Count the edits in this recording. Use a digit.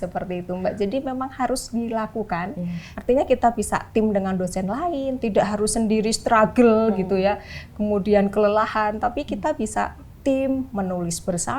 1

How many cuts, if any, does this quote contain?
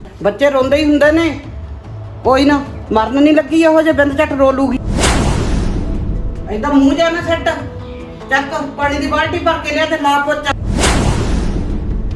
3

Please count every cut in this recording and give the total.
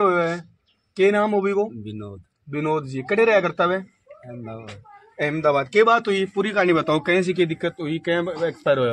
0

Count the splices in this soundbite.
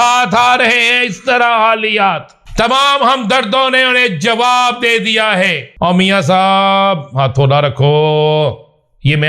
2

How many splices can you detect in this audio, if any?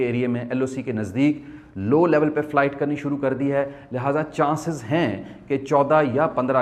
0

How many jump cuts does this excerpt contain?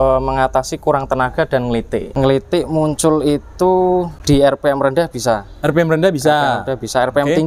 2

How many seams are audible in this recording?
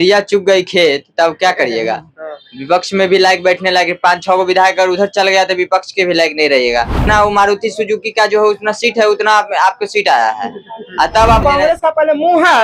2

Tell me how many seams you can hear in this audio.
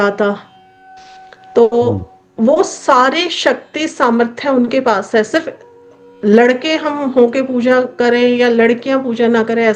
0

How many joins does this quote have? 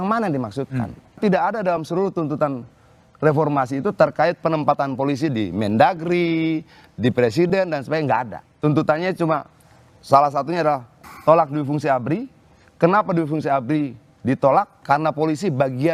0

